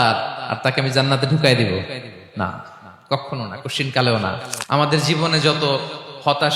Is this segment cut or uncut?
cut